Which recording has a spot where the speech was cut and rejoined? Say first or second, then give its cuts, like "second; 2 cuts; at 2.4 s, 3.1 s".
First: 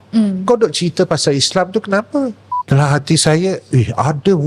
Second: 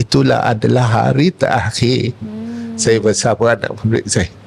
first; 1 cut; at 2.5 s